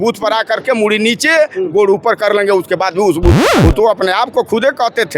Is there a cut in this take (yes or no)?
yes